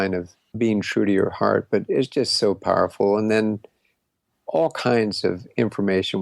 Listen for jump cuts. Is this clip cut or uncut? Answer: uncut